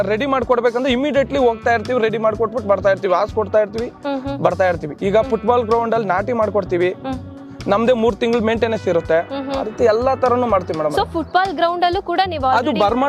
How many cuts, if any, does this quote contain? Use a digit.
0